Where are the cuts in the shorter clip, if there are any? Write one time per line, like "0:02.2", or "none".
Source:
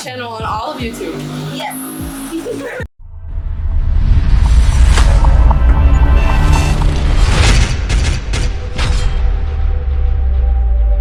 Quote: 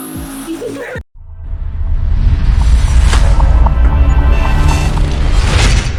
none

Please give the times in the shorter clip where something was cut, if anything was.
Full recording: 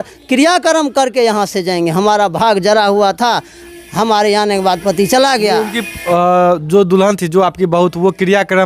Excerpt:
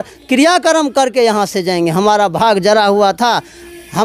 none

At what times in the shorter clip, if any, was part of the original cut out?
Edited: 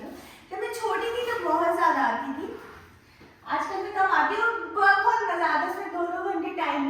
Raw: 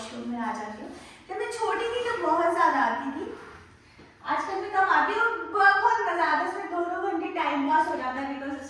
none

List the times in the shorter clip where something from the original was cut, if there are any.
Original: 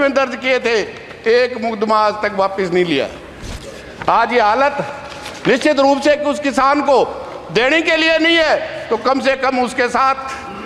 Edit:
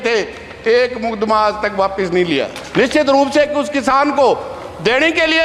0:02.6

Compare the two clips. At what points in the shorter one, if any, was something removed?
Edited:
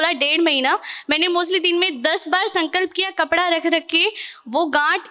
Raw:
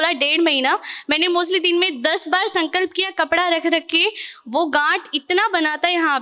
none

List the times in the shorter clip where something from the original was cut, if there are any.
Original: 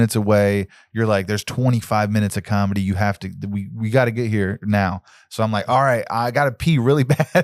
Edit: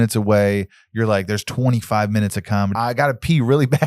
0:02.7

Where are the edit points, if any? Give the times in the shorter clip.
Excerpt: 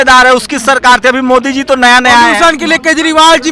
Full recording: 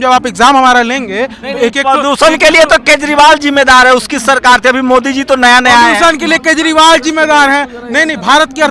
none

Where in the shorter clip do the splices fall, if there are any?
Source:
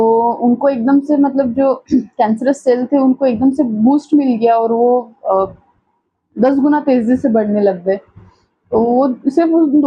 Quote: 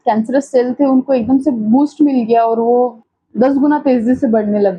0:03.0

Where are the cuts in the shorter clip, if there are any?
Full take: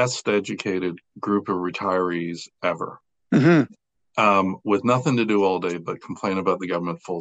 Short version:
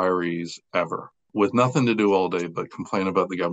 0:01.3

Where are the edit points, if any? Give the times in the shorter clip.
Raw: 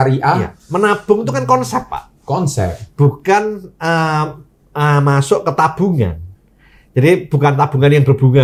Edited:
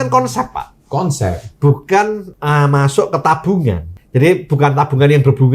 0:02.3
0:03.9

